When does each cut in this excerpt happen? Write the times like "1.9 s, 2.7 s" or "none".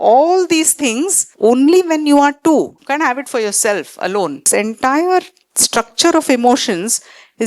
1.2 s, 2.8 s, 4.5 s

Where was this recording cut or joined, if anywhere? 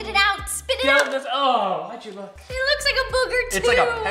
2.4 s

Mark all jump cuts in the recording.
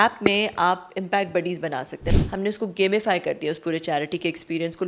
2.0 s

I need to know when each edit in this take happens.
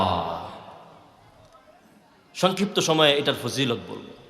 none

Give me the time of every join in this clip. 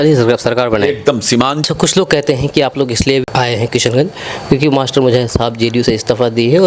1.7 s, 3.2 s

